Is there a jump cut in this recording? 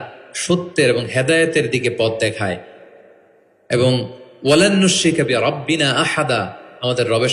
no; 0 cuts

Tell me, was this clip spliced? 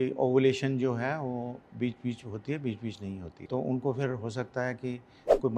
yes; 1 cut; at 3.4 s

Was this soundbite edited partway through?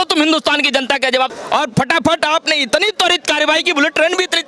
yes; 1 cut; at 1.4 s

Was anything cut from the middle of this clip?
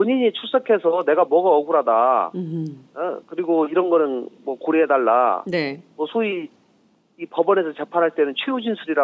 yes; 1 cut; at 5.4 s

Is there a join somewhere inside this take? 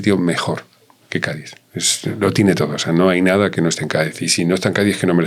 no; 0 cuts

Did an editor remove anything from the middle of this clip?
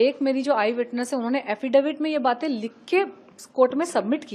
no; 0 cuts

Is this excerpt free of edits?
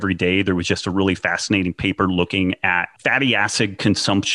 no; 1 cut; at 2.9 s

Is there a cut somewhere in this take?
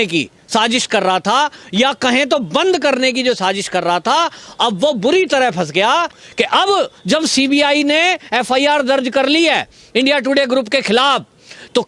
yes; 1 cut; at 6.2 s

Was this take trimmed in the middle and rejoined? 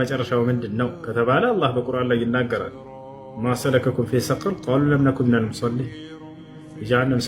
no; 0 cuts

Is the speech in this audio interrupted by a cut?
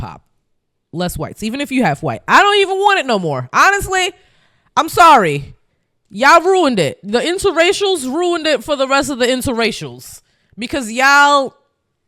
no; 0 cuts

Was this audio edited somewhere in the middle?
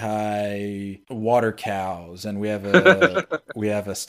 yes; 1 cut; at 1.0 s

